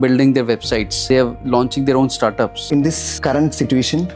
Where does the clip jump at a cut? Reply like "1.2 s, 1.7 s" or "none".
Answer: 2.7 s